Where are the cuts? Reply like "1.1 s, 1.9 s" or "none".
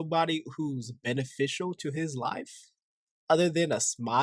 none